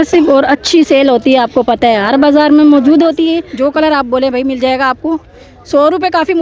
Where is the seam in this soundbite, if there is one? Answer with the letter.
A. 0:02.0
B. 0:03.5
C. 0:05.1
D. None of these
B